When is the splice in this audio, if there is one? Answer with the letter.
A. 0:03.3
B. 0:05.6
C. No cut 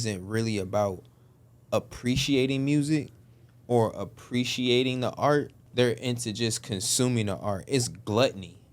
B